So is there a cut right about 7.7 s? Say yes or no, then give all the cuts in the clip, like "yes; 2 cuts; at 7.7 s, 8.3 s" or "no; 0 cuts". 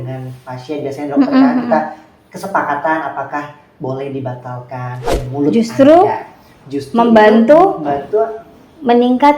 no; 1 cut; at 5.1 s